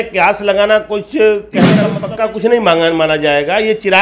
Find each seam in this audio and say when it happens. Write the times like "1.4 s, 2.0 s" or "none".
1.9 s